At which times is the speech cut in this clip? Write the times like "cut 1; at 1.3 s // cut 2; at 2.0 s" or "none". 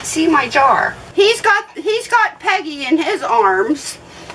cut 1; at 1.0 s